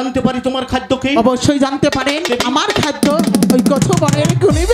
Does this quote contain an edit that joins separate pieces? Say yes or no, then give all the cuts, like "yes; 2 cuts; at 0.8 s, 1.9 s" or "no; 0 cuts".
yes; 1 cut; at 2.3 s